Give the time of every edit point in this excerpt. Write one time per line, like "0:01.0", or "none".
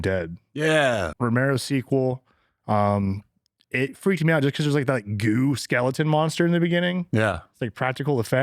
0:01.1